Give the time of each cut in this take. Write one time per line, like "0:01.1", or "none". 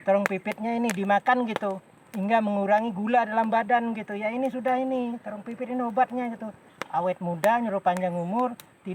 none